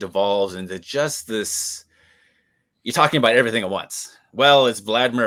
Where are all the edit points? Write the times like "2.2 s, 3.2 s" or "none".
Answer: none